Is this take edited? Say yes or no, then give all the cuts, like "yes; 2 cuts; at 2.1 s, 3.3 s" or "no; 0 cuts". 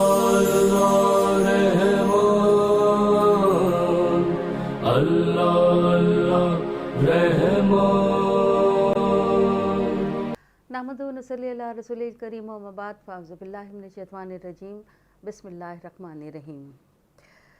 yes; 1 cut; at 10.2 s